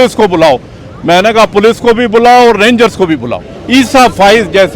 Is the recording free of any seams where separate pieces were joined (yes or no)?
no